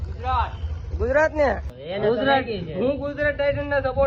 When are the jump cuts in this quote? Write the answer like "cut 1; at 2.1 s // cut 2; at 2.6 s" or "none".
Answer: cut 1; at 1.7 s